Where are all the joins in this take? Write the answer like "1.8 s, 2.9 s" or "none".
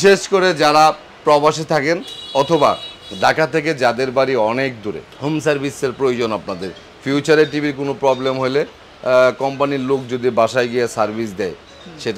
none